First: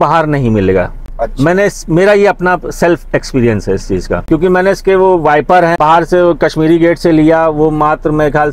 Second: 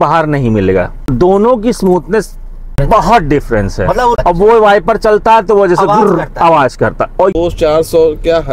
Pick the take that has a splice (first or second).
second